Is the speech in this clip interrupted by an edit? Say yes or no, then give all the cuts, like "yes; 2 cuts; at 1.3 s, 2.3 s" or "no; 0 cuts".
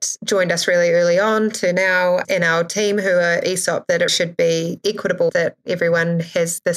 yes; 3 cuts; at 2.2 s, 4.1 s, 5.3 s